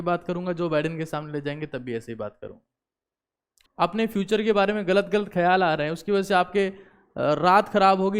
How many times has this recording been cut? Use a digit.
1